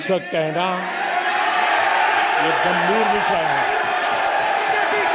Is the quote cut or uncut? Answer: uncut